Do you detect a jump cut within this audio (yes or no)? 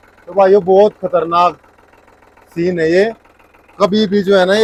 no